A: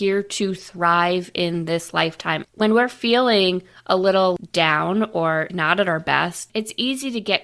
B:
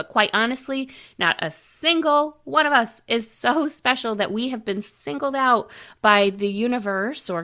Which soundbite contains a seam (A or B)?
A